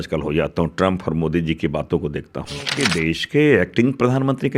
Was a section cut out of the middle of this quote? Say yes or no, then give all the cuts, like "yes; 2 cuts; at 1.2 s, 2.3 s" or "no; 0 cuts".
yes; 1 cut; at 2.7 s